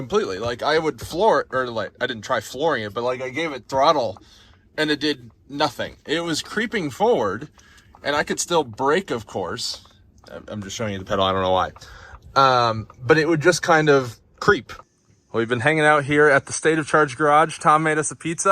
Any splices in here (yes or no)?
yes